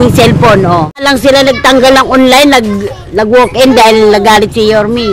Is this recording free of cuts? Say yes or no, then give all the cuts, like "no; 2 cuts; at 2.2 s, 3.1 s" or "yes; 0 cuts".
no; 1 cut; at 1.0 s